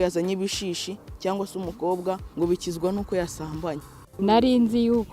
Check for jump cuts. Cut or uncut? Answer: cut